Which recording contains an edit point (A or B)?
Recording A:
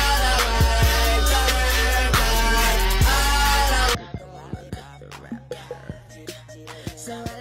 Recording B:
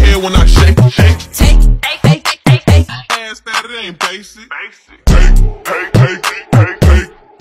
A